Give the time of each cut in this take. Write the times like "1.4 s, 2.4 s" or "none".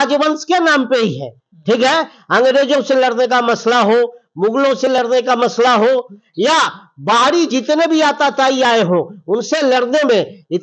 none